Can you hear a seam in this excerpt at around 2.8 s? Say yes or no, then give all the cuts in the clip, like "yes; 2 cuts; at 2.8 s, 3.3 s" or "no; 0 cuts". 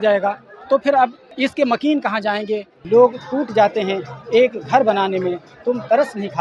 yes; 2 cuts; at 1.2 s, 2.8 s